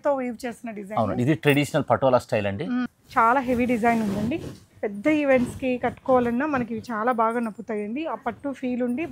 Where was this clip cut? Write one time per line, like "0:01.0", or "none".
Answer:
0:02.9